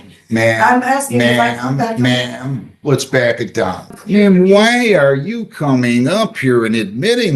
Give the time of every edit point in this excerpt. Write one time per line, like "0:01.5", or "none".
0:04.0